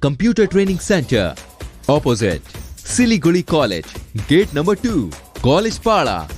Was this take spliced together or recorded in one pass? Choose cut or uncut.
uncut